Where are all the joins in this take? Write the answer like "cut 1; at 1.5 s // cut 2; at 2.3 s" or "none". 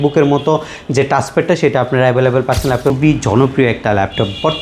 cut 1; at 2.9 s